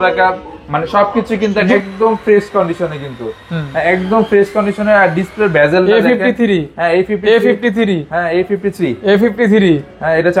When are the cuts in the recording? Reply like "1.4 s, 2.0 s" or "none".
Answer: 1.7 s